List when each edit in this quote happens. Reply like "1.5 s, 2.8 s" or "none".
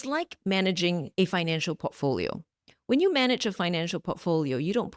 1.1 s